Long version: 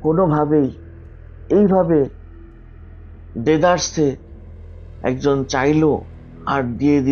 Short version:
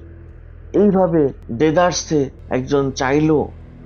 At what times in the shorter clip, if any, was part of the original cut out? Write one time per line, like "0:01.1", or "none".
0:01.4
0:02.4